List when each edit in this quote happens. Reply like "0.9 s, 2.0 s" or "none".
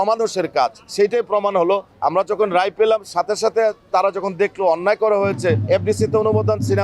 1.9 s, 5.6 s